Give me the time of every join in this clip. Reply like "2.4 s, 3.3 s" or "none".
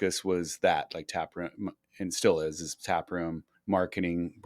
3.5 s